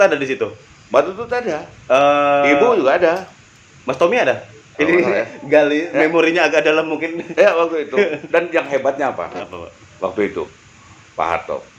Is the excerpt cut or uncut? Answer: uncut